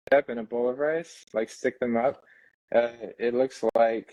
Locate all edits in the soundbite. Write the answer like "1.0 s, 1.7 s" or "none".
none

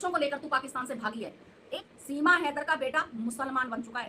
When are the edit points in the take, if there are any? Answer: 1.9 s

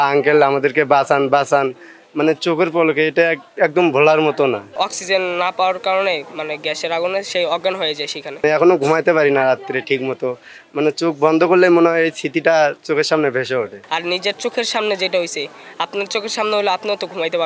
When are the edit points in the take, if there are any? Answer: 4.8 s, 8.4 s, 13.8 s

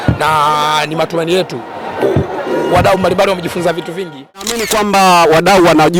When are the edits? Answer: 4.6 s

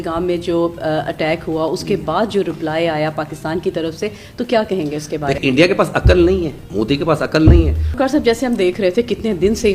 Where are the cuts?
5.4 s, 6.6 s, 7.9 s

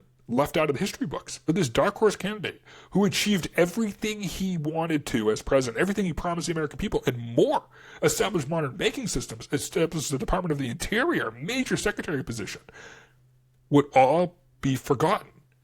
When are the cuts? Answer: 1.3 s

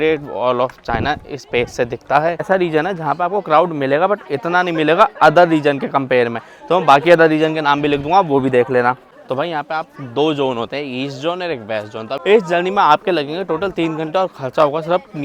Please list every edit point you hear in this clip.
2.5 s, 9.1 s, 12.2 s

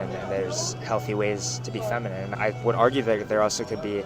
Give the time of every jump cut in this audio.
none

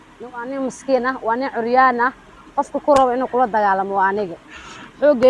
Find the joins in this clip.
none

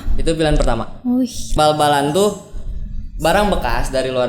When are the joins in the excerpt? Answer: 1.5 s

